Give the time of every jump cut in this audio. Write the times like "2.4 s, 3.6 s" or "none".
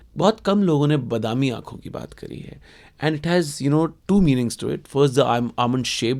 none